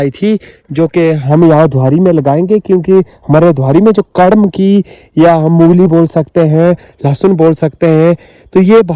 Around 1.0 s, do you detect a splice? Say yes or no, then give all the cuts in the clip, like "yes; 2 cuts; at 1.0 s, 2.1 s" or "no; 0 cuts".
no; 0 cuts